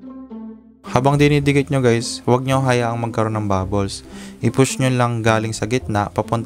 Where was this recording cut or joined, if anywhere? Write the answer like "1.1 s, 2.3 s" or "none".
0.9 s